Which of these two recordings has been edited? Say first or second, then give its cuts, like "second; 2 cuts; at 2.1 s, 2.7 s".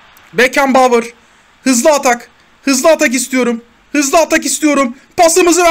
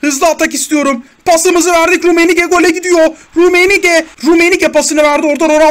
second; 1 cut; at 4.1 s